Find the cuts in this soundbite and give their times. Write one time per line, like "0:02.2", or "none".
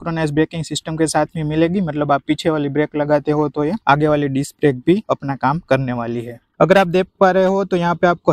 0:06.4